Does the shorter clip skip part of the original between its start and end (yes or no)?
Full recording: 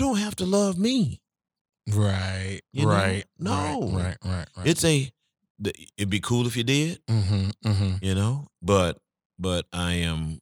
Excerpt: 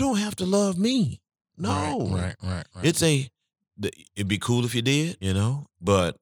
yes